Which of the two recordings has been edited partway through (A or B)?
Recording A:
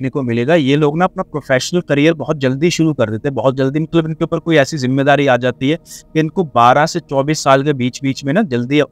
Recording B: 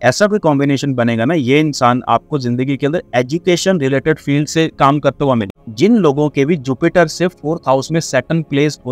B